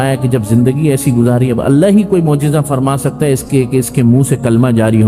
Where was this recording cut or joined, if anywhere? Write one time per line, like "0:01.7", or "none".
none